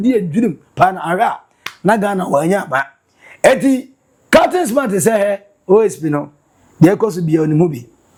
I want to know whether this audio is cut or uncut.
uncut